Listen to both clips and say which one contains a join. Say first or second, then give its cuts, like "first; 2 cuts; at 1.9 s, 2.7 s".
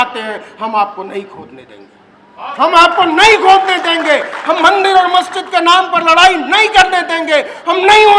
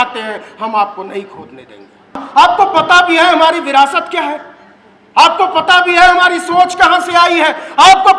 second; 1 cut; at 2.2 s